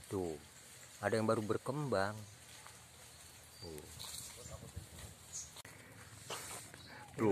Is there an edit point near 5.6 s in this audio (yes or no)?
yes